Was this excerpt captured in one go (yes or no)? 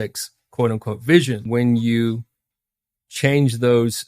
no